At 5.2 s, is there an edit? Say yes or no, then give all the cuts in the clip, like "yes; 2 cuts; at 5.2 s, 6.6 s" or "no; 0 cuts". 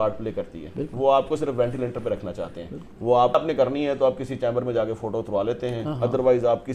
no; 1 cut; at 3.4 s